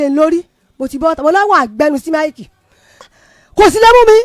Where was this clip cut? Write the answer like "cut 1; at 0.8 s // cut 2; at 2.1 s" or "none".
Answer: cut 1; at 3.1 s